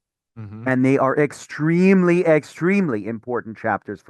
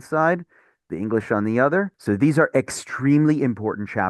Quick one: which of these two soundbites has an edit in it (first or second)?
second